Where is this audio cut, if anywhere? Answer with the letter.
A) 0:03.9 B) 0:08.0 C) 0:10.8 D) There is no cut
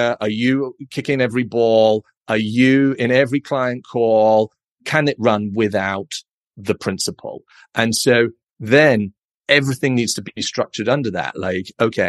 D